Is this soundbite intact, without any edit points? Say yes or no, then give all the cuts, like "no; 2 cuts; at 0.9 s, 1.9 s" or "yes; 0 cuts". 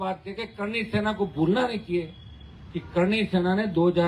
yes; 0 cuts